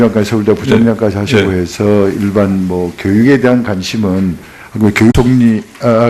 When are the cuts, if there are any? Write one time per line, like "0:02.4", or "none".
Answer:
none